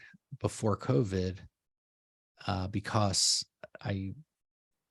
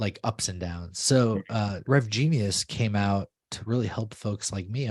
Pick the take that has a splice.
second; 1 cut; at 1.8 s

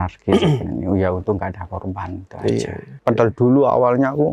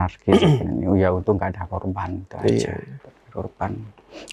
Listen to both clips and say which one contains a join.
first; 1 cut; at 2.9 s

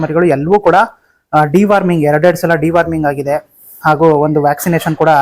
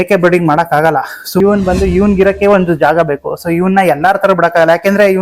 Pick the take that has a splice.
second; 1 cut; at 1.4 s

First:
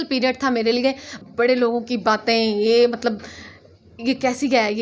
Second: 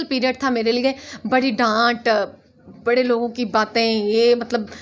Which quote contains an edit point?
first; 1 cut; at 1.1 s

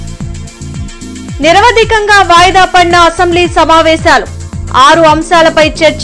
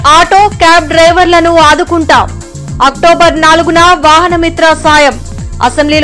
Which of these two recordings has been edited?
first; 1 cut; at 1.2 s

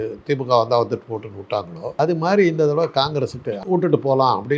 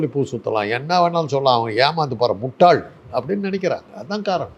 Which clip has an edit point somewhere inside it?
first; 2 cuts; at 2.0 s, 3.6 s

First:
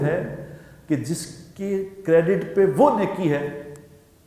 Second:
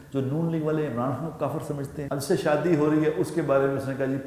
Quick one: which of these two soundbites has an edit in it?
second; 1 cut; at 1.9 s

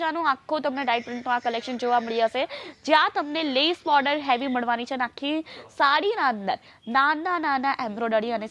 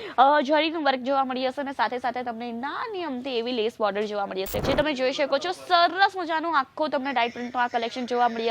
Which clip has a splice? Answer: second; 1 cut; at 4.6 s

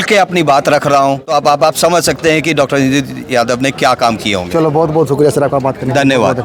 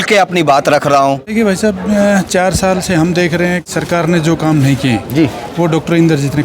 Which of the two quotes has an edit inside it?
second; 2 cuts; at 1.2 s, 3.7 s

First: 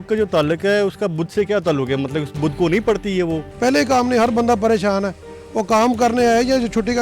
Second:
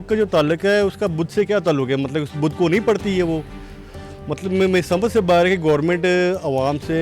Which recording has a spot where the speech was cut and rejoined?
first; 1 cut; at 3.5 s

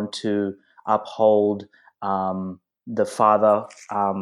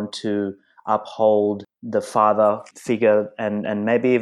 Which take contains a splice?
second; 2 cuts; at 1.7 s, 2.7 s

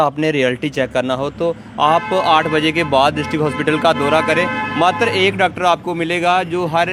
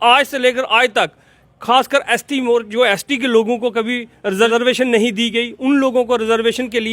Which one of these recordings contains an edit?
second; 1 cut; at 4.5 s

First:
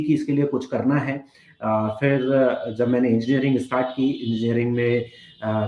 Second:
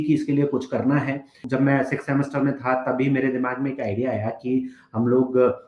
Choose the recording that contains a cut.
second; 1 cut; at 1.4 s

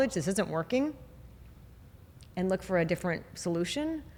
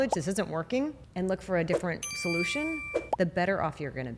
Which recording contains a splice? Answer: second; 1 cut; at 1.0 s

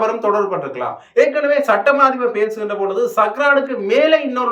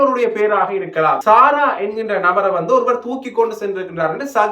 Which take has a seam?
second; 1 cut; at 1.2 s

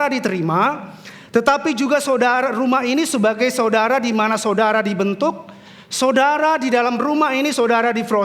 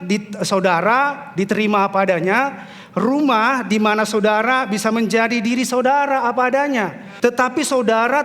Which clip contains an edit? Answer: second; 1 cut; at 7.1 s

